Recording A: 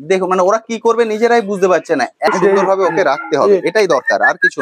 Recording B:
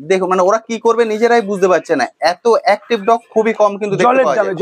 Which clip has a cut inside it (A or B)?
A